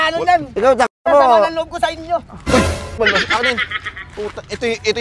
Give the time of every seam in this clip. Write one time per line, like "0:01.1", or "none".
0:03.0